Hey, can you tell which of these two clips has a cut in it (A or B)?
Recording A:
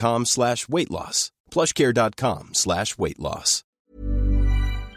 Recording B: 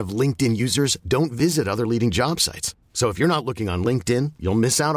A